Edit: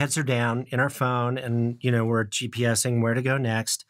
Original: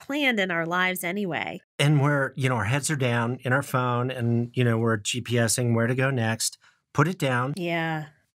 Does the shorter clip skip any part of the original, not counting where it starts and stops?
no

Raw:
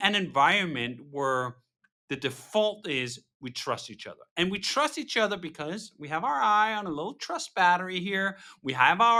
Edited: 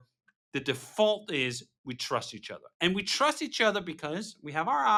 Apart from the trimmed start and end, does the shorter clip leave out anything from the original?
no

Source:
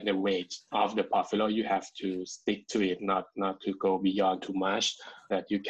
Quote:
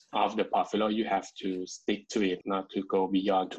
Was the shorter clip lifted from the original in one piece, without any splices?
no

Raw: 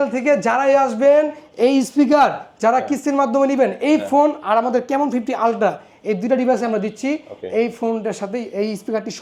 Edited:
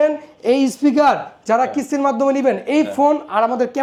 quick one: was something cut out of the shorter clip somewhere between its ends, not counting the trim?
no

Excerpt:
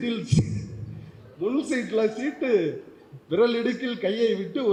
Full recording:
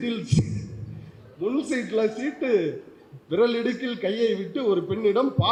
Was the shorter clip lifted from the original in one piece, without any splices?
yes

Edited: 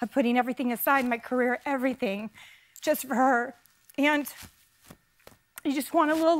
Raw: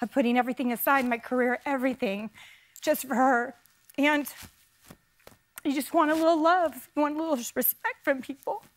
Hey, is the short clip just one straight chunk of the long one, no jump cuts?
yes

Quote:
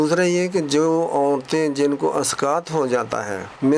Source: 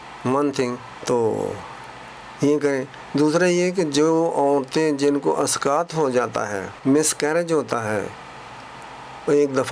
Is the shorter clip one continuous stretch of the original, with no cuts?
yes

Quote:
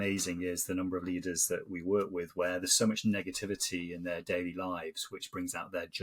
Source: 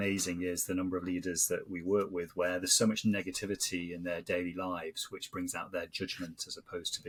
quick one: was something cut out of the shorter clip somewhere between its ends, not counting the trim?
no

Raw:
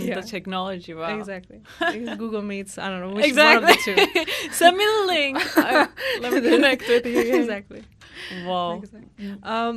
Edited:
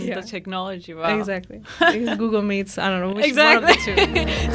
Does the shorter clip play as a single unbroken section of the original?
yes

